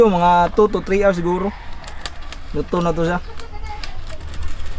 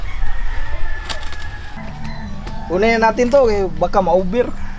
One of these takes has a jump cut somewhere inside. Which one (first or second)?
second